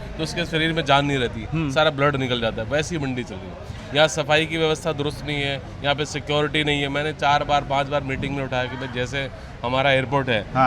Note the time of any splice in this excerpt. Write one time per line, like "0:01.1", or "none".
none